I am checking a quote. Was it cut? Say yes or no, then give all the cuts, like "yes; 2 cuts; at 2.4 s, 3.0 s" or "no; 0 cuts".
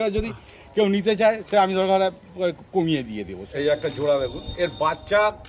yes; 1 cut; at 3.4 s